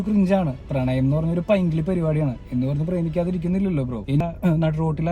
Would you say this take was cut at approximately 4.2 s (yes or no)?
yes